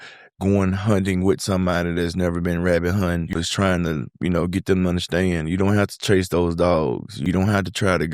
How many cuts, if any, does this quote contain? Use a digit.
2